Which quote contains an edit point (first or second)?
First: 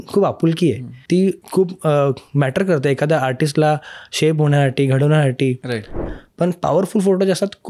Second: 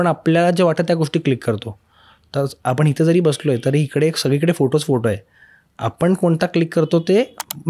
first